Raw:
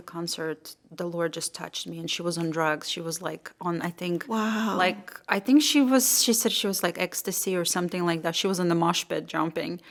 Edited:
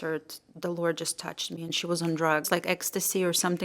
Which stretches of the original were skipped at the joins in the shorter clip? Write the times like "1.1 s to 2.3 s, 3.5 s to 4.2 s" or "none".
2.8 s to 6.8 s